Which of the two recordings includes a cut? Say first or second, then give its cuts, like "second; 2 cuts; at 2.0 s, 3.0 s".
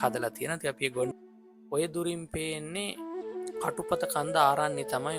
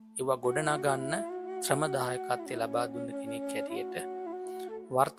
first; 1 cut; at 1.1 s